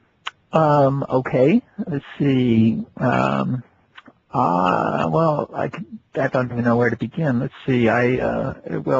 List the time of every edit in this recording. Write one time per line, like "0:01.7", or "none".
0:02.0